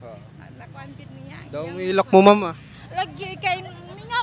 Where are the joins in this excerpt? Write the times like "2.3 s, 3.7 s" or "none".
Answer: none